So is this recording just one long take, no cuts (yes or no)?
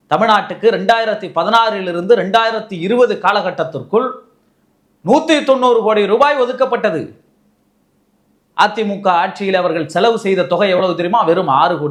yes